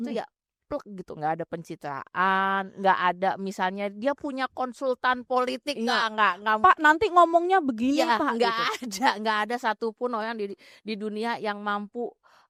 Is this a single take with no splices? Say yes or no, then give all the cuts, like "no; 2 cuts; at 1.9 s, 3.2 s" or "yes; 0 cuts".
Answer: yes; 0 cuts